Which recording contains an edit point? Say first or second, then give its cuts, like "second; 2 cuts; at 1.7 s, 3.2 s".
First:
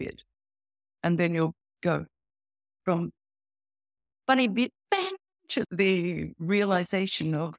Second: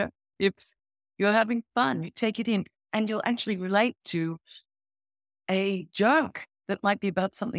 first; 1 cut; at 5.7 s